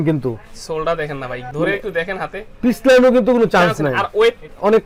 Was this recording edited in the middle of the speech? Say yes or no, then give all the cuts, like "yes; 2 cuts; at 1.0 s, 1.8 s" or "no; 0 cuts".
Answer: no; 0 cuts